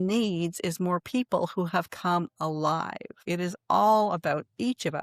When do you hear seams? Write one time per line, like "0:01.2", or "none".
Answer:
0:03.1

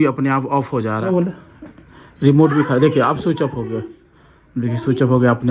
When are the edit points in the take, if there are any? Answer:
0:01.0

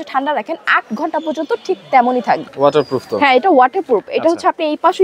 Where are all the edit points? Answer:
0:02.5

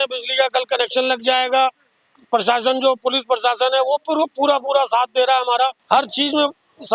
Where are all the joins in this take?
0:02.0
0:05.8

